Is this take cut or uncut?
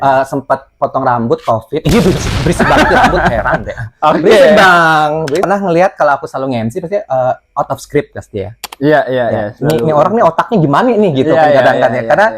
cut